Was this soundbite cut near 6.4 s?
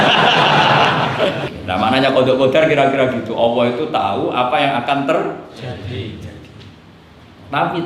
no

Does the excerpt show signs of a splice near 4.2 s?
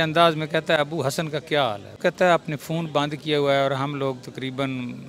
no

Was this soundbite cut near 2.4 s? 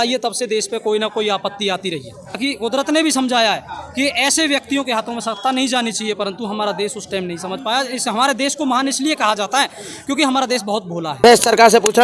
yes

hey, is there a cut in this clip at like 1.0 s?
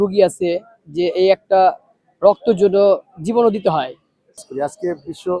no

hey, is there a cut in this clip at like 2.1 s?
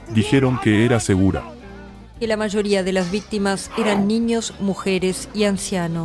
yes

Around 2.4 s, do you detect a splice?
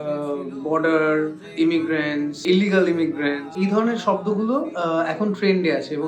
yes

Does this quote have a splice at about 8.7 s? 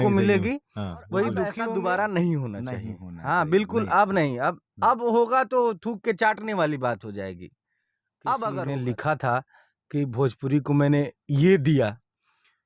yes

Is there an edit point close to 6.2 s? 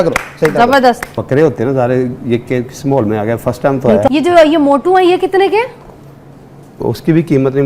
no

